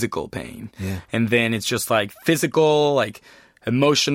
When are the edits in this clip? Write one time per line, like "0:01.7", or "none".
0:02.1